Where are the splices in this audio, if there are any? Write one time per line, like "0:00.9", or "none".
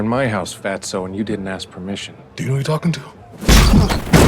0:02.2

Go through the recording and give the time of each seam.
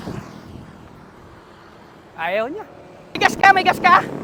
none

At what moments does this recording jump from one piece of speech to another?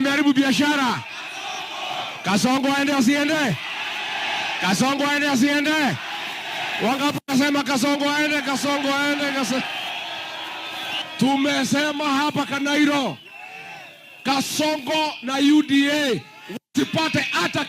0:11.0

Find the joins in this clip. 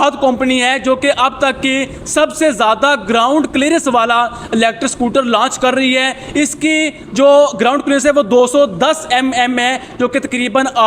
none

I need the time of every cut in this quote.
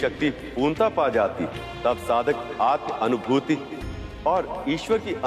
0:01.6

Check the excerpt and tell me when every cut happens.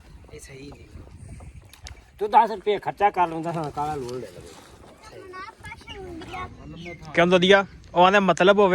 0:06.5

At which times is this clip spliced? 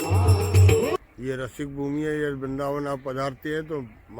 0:01.0

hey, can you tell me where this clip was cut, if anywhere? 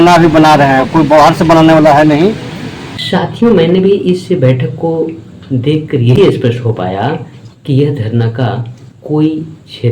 0:02.9

